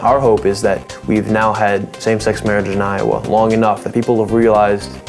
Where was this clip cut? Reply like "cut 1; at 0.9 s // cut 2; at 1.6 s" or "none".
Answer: cut 1; at 0.9 s